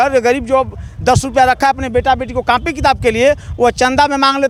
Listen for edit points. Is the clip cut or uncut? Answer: uncut